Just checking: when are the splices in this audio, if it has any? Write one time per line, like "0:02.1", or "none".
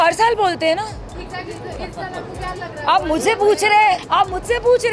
0:01.1
0:04.0